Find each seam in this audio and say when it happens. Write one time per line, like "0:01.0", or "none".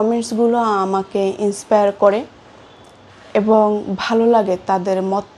none